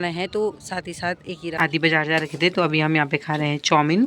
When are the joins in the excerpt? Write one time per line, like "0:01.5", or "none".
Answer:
0:01.7